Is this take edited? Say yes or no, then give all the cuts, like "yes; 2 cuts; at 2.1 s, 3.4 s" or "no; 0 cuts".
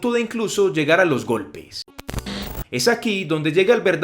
yes; 1 cut; at 2.1 s